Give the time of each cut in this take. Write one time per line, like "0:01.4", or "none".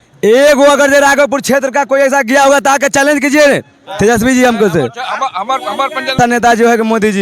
0:06.2